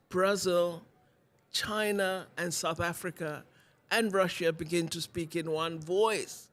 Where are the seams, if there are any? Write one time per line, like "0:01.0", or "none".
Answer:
none